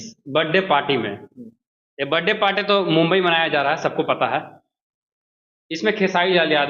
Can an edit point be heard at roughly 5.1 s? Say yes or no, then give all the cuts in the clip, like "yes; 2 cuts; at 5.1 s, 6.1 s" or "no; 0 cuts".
yes; 1 cut; at 5.1 s